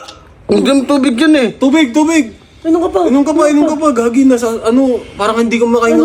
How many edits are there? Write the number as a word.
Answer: zero